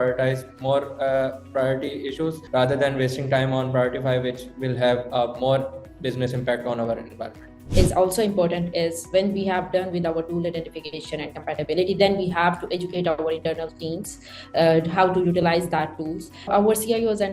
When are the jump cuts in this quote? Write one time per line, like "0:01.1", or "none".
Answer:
0:02.4
0:07.6
0:16.5